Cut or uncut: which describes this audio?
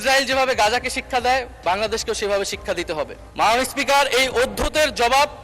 cut